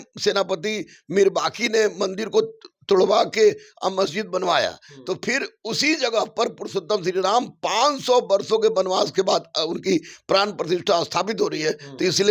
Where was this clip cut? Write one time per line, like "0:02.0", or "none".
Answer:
none